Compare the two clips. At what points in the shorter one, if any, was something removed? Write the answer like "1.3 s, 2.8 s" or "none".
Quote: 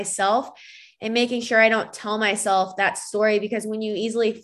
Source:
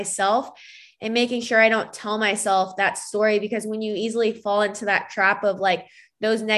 none